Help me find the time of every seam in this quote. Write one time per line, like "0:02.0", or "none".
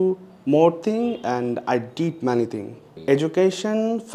0:03.1